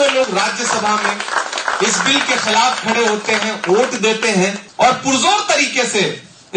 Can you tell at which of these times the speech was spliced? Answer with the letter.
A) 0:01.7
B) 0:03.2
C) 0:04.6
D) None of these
C